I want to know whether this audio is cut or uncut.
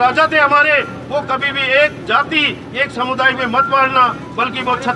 uncut